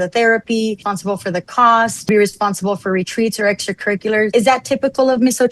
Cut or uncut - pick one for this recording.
cut